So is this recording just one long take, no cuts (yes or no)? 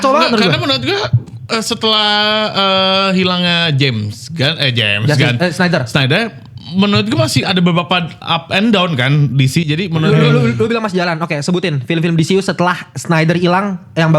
no